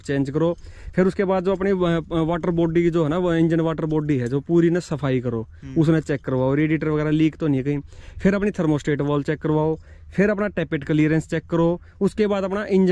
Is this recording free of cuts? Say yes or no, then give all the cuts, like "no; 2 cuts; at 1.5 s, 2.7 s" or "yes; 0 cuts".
yes; 0 cuts